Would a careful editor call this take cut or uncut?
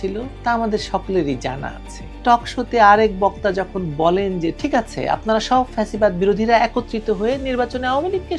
cut